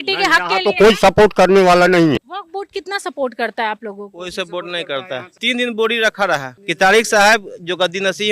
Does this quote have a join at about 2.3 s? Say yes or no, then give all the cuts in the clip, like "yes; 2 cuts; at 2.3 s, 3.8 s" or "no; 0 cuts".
yes; 1 cut; at 2.3 s